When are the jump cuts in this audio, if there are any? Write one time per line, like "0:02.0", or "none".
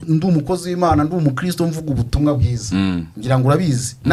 none